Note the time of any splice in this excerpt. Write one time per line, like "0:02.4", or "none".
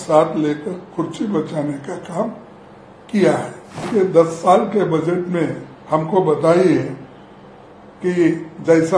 0:03.8